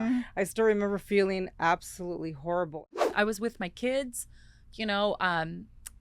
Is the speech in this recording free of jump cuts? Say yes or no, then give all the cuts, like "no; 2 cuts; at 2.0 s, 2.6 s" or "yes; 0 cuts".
no; 1 cut; at 2.9 s